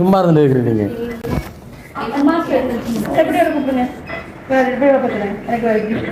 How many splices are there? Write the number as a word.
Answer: zero